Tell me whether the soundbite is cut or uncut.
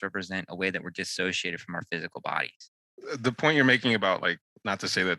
uncut